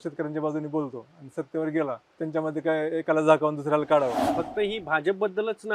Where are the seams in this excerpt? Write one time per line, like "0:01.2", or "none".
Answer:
0:02.1
0:04.2